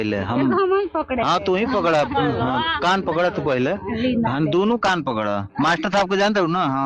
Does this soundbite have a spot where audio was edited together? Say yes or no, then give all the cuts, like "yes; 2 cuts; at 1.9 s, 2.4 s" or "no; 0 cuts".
no; 0 cuts